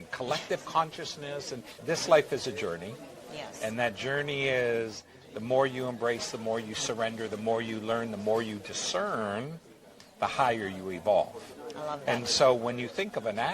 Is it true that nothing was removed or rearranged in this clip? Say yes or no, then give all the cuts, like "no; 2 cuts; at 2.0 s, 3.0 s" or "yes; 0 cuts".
no; 1 cut; at 1.6 s